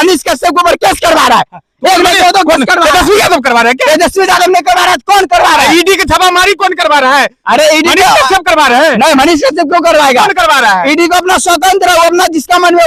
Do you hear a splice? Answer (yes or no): no